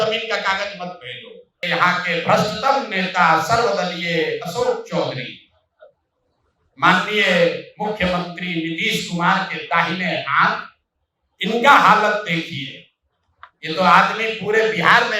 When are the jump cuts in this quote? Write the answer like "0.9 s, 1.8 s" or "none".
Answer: 1.6 s